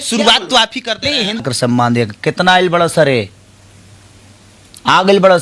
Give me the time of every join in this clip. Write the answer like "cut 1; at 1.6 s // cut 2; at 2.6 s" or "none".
cut 1; at 1.4 s